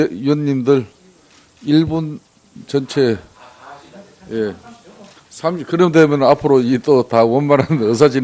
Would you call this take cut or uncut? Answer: uncut